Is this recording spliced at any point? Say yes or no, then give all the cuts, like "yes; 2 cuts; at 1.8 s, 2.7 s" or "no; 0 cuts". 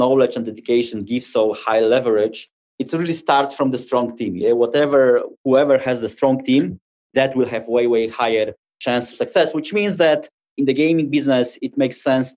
no; 0 cuts